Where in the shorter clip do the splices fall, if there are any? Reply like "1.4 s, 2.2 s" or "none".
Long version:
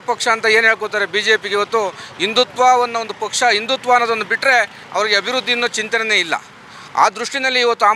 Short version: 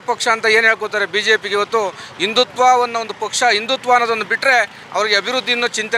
none